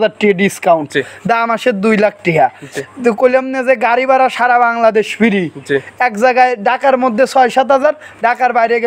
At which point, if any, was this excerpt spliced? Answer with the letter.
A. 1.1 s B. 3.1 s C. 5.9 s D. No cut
D